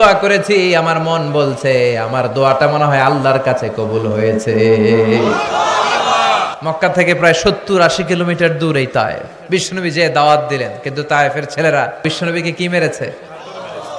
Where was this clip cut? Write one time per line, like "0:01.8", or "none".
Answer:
0:06.5
0:09.3
0:12.0